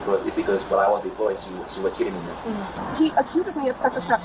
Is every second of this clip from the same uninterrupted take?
no; 1 cut; at 2.8 s

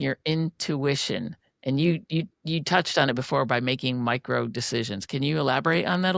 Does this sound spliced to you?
no; 0 cuts

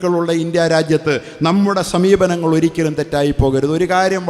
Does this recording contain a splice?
yes; 1 cut; at 1.3 s

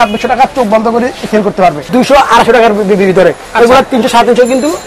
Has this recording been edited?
yes; 1 cut; at 1.8 s

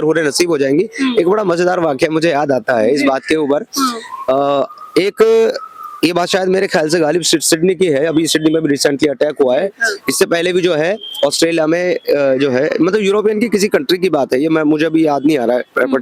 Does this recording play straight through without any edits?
yes; 0 cuts

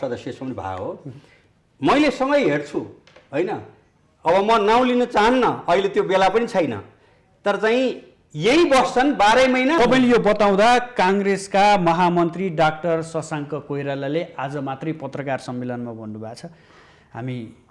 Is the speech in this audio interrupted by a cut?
yes; 1 cut; at 9.8 s

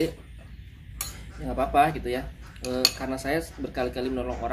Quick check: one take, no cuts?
yes; 0 cuts

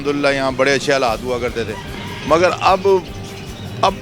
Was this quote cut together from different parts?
no; 0 cuts

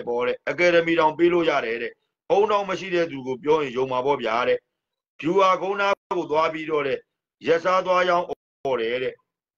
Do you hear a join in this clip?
no; 0 cuts

